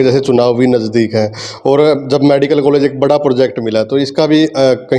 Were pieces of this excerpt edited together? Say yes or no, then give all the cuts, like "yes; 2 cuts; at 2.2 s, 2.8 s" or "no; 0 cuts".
no; 0 cuts